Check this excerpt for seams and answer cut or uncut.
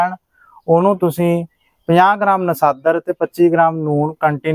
uncut